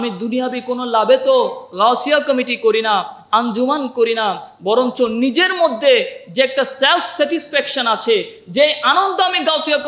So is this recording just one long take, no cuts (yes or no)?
yes